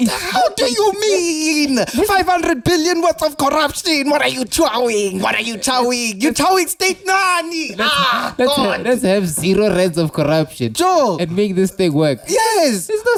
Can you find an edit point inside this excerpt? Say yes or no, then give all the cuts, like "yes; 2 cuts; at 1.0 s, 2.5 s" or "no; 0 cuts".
no; 0 cuts